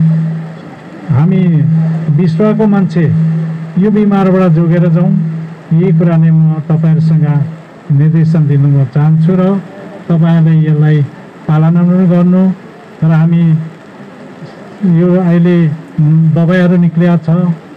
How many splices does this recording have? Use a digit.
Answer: 0